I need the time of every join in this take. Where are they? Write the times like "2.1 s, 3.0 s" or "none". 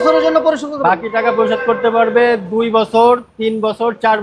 none